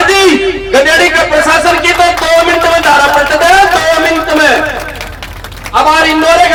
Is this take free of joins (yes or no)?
yes